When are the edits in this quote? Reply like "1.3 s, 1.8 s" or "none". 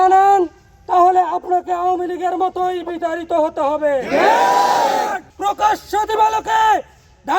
5.3 s